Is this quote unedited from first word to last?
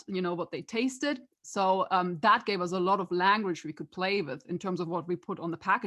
yes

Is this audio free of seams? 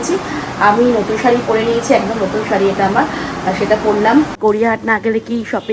no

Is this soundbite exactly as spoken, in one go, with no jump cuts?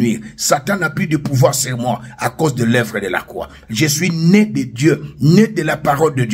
yes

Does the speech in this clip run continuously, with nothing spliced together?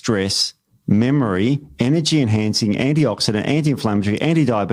yes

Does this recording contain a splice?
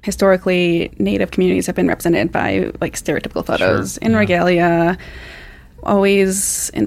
yes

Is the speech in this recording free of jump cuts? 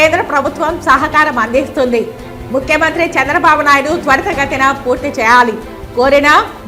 yes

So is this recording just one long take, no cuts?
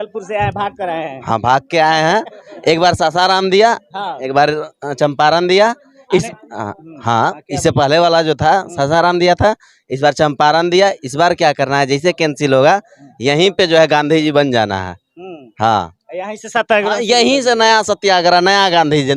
yes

